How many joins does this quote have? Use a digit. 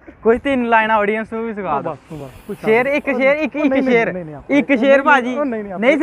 0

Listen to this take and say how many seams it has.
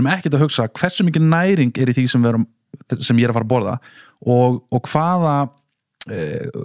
0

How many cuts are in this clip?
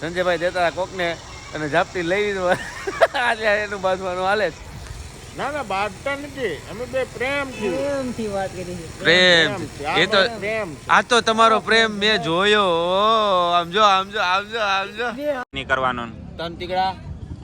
1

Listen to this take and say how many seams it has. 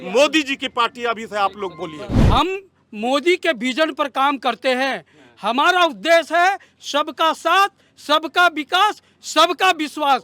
1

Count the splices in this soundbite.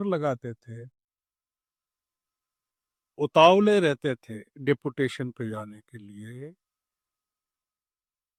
0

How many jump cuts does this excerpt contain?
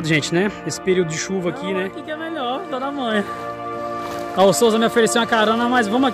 1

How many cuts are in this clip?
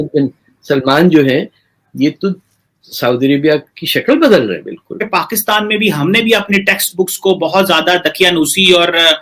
1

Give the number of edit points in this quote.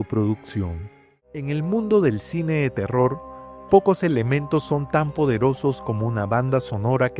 1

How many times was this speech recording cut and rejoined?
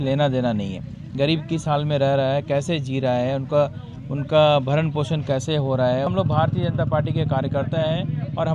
1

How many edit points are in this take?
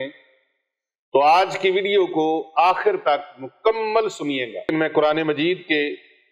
1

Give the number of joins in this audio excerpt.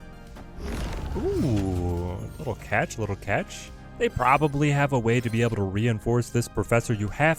0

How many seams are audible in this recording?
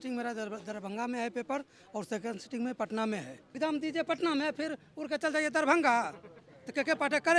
1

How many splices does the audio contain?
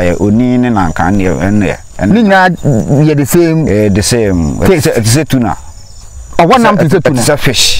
0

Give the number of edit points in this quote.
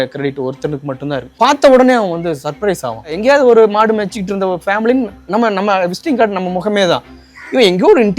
2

